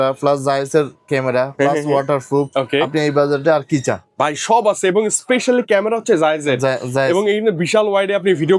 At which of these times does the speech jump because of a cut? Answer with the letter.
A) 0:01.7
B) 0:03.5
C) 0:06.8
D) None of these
D